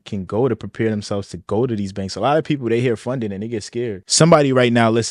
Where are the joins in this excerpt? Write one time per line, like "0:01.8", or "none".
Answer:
0:04.0